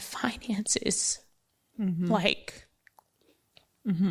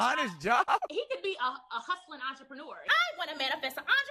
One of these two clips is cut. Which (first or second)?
second